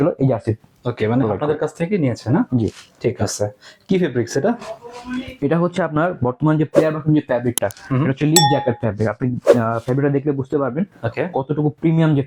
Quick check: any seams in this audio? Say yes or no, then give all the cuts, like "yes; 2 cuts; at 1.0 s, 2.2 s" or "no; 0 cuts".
no; 0 cuts